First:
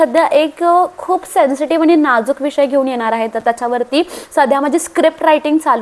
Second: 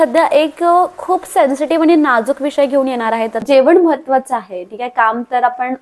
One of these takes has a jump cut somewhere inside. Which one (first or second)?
second